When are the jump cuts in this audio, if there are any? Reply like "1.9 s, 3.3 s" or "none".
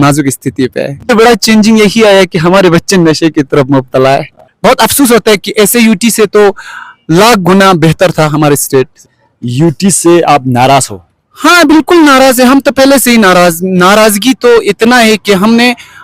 1.0 s, 4.4 s, 9.2 s